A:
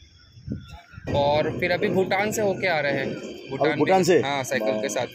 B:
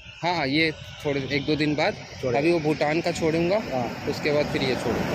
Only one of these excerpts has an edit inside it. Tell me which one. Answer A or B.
A